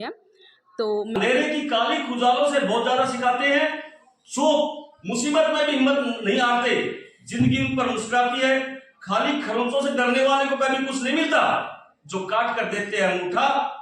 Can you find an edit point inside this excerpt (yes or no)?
yes